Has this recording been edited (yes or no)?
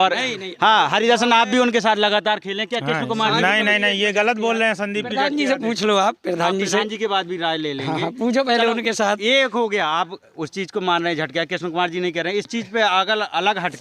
no